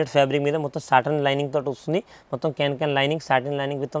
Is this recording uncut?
yes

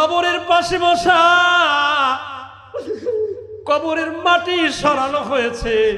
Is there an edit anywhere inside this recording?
no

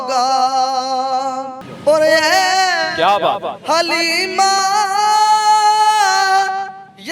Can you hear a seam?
no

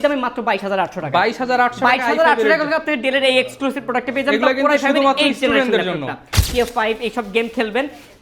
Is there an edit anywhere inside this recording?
yes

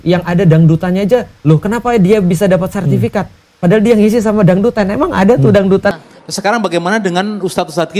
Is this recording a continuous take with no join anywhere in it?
no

